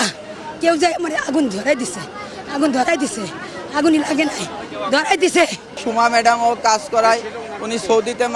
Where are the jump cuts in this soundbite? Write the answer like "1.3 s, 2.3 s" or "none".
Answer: 5.8 s